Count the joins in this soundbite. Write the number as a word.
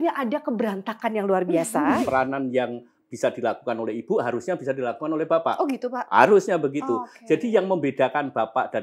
one